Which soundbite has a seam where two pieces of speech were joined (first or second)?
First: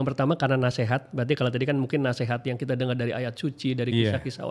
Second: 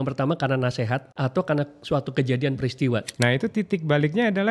second